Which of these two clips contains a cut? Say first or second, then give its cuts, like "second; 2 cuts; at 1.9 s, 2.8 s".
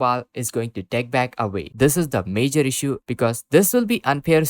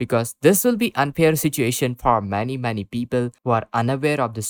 first; 1 cut; at 1.7 s